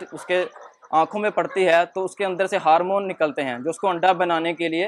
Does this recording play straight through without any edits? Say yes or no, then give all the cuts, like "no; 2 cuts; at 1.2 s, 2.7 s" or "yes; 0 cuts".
yes; 0 cuts